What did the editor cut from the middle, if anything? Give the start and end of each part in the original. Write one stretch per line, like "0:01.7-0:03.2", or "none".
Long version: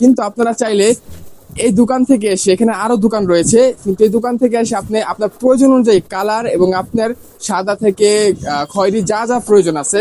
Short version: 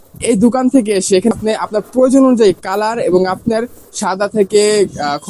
0:02.7-0:04.8